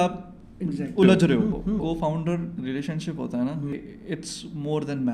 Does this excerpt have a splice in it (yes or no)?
yes